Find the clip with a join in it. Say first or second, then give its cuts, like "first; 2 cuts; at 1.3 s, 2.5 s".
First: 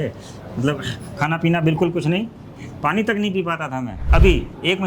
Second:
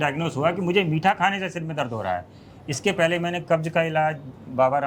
first; 1 cut; at 4.0 s